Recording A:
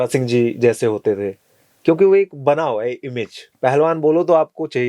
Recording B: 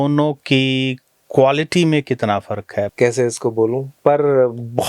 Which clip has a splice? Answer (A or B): B